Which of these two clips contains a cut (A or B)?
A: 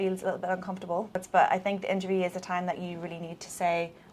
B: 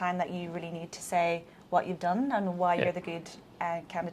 A